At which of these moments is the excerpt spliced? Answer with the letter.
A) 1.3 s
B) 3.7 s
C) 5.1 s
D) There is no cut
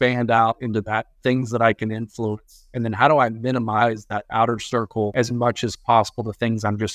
C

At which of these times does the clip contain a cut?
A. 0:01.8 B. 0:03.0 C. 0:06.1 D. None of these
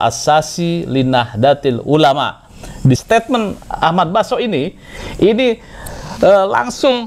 B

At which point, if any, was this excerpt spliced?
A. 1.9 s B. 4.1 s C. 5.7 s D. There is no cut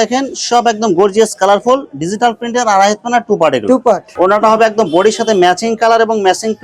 B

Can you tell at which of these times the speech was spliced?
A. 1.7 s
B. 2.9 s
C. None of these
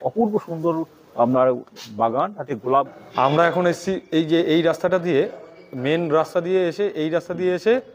B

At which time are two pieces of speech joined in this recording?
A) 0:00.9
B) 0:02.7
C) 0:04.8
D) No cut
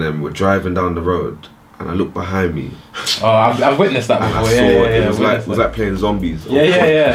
D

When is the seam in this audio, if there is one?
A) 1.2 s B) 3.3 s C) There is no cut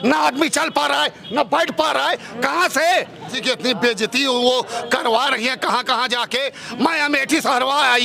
B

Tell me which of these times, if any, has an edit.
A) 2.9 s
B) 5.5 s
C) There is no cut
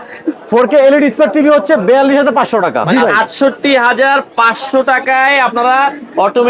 A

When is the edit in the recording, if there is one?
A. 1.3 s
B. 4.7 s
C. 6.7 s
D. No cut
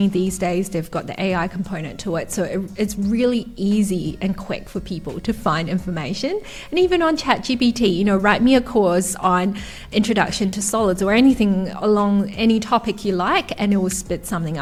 D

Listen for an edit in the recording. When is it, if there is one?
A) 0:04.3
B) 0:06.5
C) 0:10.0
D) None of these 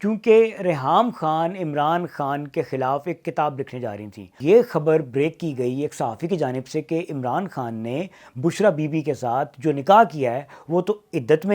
A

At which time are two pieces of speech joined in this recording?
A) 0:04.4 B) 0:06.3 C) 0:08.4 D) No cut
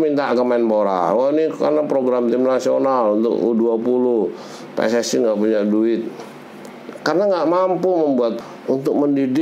C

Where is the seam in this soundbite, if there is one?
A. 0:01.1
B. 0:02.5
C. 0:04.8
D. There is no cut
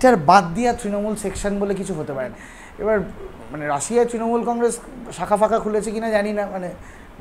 B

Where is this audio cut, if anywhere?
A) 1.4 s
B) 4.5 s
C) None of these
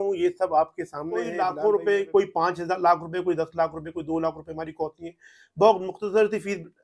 A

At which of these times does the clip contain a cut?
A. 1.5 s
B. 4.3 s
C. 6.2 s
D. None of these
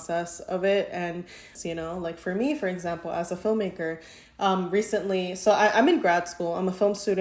A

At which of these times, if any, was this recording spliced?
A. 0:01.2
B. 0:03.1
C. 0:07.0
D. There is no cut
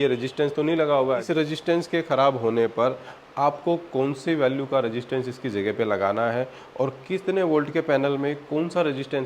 A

